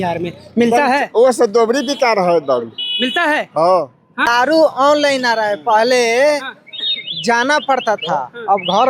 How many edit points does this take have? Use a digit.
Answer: 1